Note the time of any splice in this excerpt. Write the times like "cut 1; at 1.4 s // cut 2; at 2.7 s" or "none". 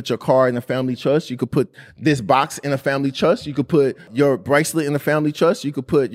cut 1; at 1.8 s // cut 2; at 4.1 s